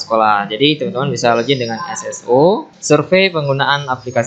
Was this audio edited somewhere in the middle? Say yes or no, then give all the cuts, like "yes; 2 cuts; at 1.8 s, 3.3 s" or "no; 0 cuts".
yes; 1 cut; at 2.7 s